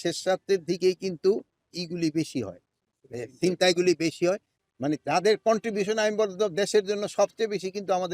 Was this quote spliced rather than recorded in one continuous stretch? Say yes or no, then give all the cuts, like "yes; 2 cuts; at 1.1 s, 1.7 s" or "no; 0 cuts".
yes; 1 cut; at 4.6 s